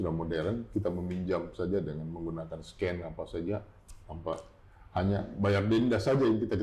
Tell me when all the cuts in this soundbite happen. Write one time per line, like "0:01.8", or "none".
none